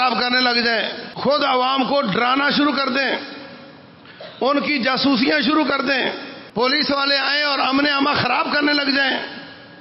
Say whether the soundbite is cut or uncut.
cut